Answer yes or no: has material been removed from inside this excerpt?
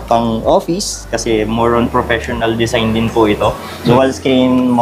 yes